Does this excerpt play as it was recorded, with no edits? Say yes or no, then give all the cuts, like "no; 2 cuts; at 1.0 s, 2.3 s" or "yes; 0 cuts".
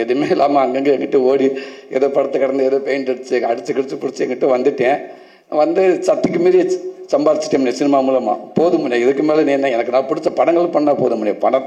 yes; 0 cuts